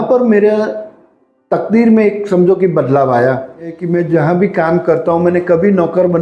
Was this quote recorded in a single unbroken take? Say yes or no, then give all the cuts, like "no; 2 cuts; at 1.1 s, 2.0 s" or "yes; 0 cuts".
no; 1 cut; at 3.8 s